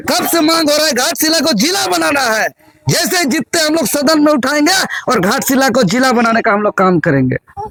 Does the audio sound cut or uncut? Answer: uncut